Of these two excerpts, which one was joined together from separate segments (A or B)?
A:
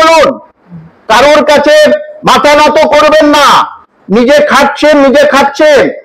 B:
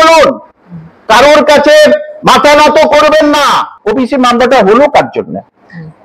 B